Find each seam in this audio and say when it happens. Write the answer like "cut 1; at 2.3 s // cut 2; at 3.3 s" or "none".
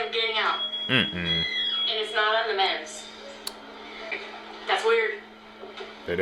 cut 1; at 4.1 s

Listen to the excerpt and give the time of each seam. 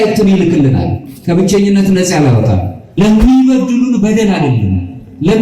cut 1; at 2.8 s

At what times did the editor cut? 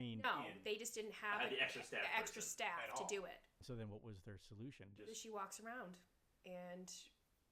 cut 1; at 3.5 s

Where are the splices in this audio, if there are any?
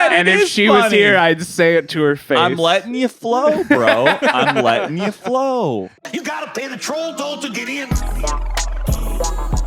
cut 1; at 6.0 s

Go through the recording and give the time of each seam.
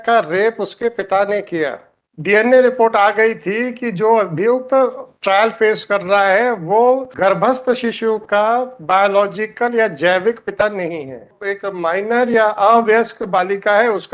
cut 1; at 1.9 s // cut 2; at 7.1 s // cut 3; at 11.4 s

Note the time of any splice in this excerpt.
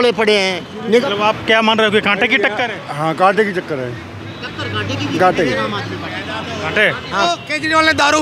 cut 1; at 1.0 s // cut 2; at 7.2 s

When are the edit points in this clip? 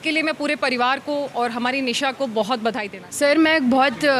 cut 1; at 3.0 s

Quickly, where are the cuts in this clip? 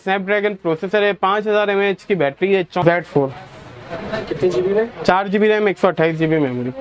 cut 1; at 2.7 s

